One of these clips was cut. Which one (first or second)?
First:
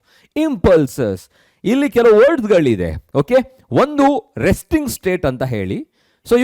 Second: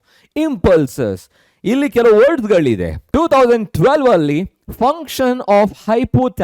second